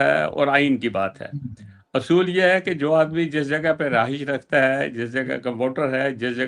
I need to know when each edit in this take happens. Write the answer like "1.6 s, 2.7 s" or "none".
none